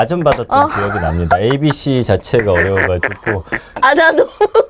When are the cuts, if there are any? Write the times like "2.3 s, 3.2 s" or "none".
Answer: 3.8 s

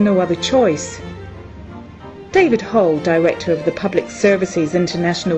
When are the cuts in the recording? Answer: 3.4 s

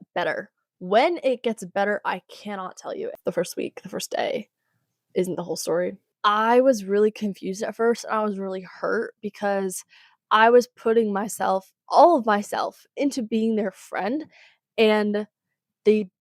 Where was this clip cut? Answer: 3.2 s, 6.1 s

